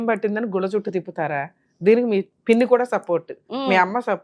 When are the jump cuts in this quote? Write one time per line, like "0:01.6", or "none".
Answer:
0:02.3